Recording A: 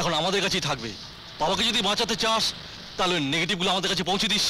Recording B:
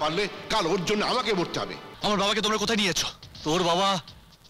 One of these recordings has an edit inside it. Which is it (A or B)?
B